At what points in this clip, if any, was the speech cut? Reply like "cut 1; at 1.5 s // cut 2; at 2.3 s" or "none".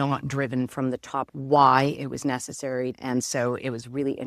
cut 1; at 1.3 s // cut 2; at 3.0 s

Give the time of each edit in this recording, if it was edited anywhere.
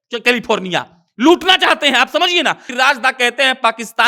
cut 1; at 2.7 s

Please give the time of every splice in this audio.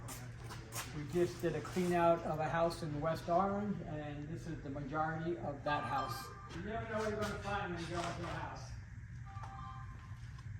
cut 1; at 6.5 s

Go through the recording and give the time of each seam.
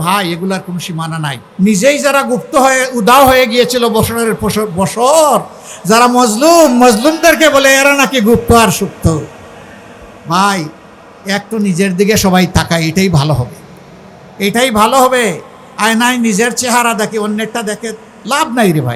cut 1; at 1.4 s

